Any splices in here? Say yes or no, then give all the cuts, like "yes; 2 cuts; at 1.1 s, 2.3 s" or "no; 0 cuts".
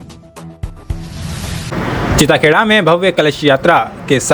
no; 0 cuts